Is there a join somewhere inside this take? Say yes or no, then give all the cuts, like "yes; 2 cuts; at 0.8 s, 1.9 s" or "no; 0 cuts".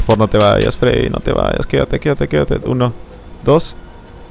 no; 0 cuts